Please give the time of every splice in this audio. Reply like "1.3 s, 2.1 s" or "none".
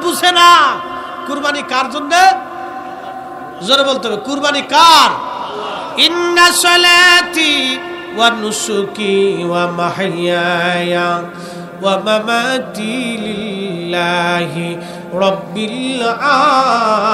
none